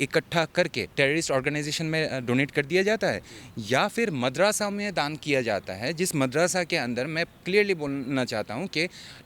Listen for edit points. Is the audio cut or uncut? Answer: cut